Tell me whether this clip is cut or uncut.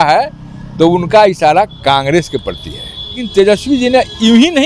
cut